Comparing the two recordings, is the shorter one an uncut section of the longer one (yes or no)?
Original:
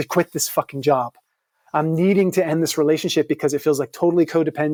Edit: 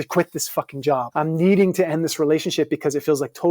no